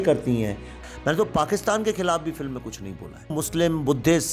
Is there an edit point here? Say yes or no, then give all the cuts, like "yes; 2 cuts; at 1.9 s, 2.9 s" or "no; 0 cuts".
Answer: yes; 2 cuts; at 0.8 s, 3.4 s